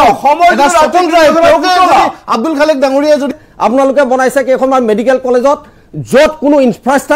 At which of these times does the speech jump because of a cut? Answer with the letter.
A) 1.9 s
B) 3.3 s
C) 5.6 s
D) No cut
B